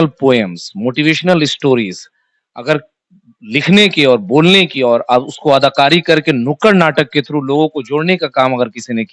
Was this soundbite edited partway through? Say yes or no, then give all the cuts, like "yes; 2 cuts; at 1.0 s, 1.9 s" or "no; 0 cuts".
no; 0 cuts